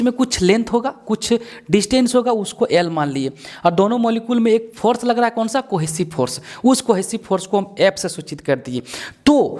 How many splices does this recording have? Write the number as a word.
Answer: zero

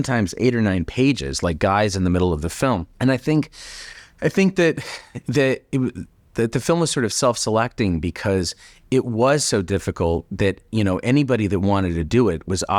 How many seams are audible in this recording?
zero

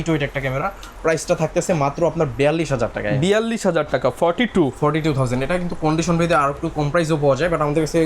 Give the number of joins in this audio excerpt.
zero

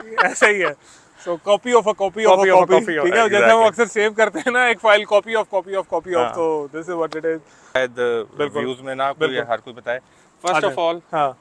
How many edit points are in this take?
one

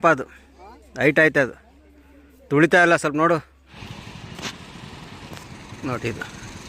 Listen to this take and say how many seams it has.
one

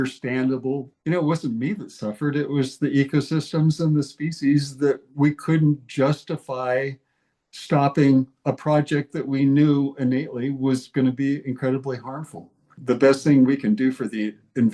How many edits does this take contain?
two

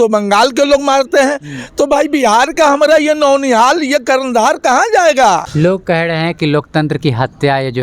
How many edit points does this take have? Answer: one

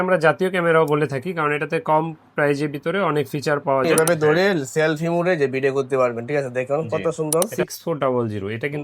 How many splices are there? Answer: two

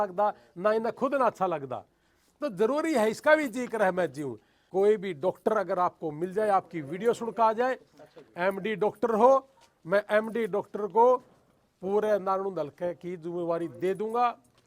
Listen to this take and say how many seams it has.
one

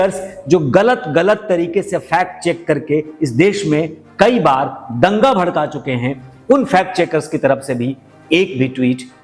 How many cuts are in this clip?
zero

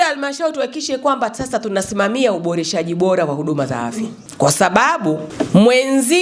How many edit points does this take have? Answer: two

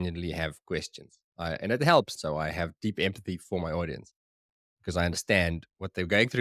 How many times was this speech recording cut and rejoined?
one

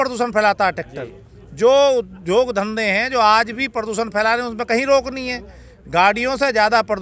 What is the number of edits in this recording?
zero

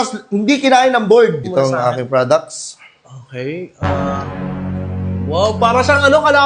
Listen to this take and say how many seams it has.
one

